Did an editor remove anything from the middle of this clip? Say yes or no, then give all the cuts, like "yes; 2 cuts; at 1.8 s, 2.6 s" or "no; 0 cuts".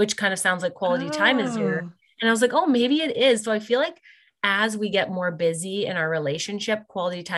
no; 0 cuts